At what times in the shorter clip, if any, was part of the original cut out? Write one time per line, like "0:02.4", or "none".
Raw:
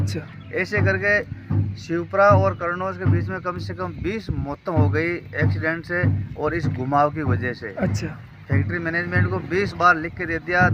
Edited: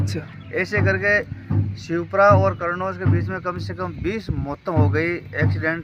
none

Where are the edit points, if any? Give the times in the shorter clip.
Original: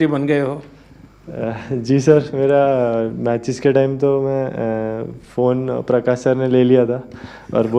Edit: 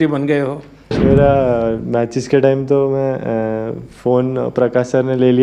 0:01.0

